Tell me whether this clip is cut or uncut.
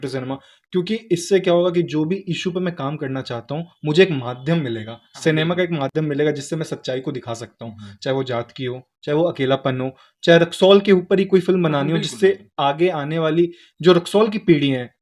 uncut